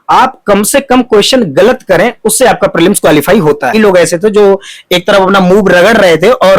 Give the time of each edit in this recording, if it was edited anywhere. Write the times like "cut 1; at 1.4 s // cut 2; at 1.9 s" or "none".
cut 1; at 3.8 s